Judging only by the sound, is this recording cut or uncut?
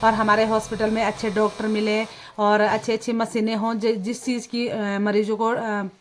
uncut